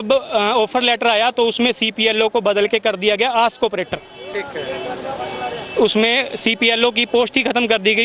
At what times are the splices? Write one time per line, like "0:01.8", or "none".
none